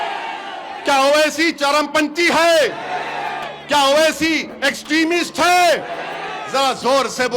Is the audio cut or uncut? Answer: uncut